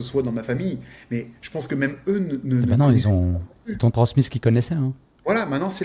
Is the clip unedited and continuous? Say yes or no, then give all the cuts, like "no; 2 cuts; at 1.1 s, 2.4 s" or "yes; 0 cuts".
yes; 0 cuts